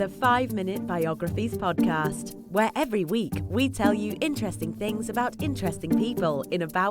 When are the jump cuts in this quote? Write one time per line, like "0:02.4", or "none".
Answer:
0:05.8